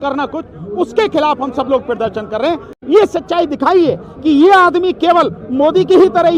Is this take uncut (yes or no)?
yes